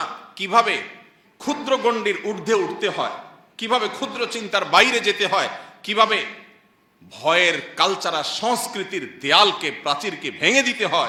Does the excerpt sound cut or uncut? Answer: uncut